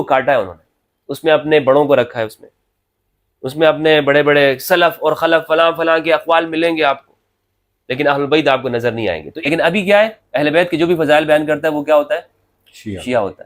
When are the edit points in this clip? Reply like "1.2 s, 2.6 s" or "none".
9.3 s